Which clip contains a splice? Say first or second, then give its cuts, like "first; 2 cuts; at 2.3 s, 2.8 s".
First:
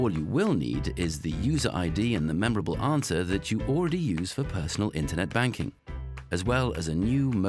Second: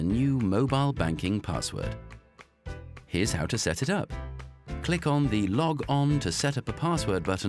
first; 1 cut; at 3.0 s